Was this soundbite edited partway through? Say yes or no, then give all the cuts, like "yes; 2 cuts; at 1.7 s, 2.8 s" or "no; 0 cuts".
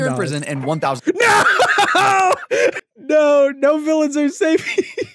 yes; 1 cut; at 2.8 s